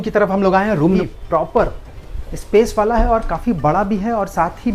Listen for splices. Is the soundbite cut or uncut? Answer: cut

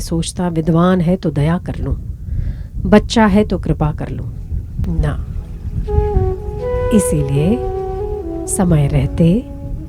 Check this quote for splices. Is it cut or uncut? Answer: cut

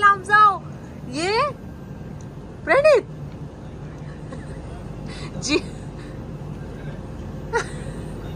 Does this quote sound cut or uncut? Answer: uncut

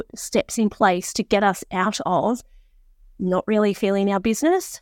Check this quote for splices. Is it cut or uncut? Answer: uncut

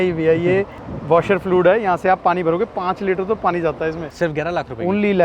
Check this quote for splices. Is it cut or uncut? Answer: cut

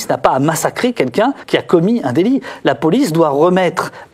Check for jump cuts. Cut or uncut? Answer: cut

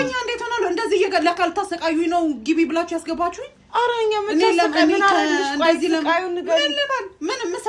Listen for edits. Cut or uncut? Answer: uncut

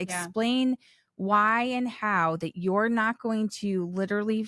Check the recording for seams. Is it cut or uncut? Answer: uncut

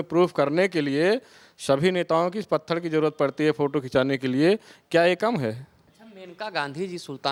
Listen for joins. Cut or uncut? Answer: uncut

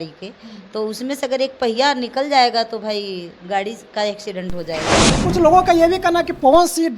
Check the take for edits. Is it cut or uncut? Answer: cut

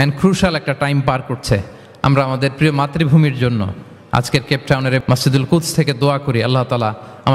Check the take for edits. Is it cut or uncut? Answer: cut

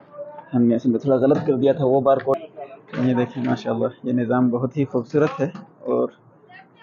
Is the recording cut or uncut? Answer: cut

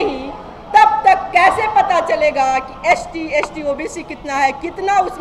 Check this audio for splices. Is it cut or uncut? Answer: uncut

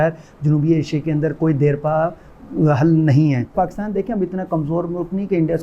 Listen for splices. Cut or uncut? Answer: cut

